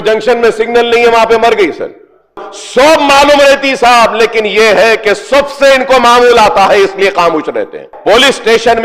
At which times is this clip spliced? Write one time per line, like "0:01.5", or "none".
0:02.5
0:07.9